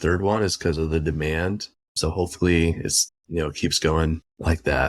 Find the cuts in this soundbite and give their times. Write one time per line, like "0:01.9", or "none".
none